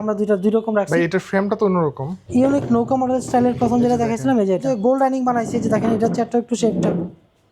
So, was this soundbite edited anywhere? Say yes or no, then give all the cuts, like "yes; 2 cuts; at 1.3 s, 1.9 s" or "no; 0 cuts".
yes; 2 cuts; at 2.2 s, 4.6 s